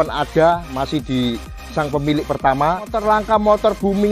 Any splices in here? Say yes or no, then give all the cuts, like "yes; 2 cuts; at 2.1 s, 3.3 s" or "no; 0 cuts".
yes; 1 cut; at 2.9 s